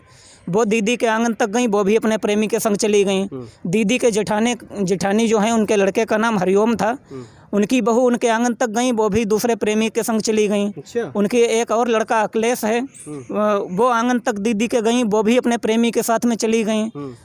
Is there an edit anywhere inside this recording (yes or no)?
no